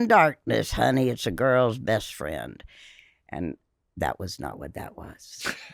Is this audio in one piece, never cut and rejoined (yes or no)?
yes